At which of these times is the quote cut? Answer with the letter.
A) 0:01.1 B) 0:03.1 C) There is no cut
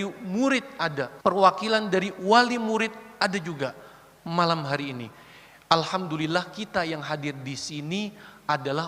A